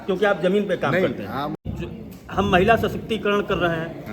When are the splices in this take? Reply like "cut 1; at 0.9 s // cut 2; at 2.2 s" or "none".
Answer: cut 1; at 1.6 s